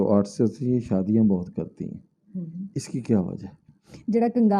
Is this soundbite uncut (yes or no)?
yes